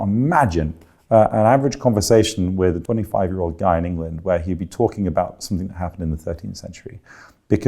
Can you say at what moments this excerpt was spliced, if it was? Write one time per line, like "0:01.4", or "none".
0:02.8